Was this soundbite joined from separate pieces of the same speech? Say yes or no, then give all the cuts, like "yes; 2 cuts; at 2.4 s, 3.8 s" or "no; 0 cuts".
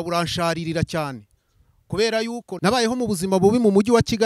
yes; 1 cut; at 2.4 s